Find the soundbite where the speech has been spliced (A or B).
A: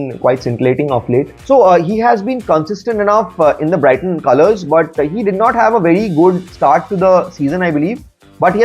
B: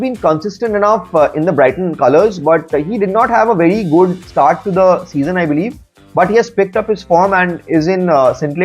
A